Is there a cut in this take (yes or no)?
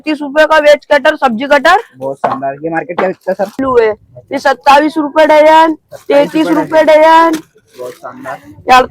yes